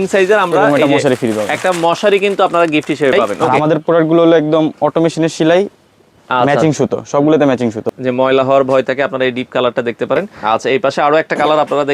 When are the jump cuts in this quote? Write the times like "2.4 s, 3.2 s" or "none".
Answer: 3.4 s, 7.9 s, 10.3 s